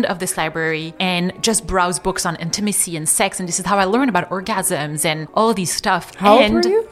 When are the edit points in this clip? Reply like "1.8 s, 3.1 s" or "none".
5.2 s